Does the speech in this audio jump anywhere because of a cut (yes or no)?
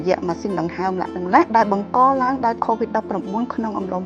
yes